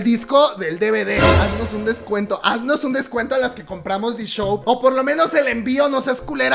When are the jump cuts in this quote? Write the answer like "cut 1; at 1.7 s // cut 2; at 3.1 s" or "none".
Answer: cut 1; at 1.3 s // cut 2; at 4.6 s